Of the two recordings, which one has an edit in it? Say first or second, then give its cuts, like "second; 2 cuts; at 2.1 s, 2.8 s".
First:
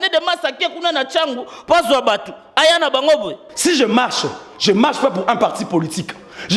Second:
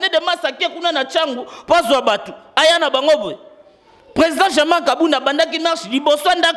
first; 1 cut; at 3.4 s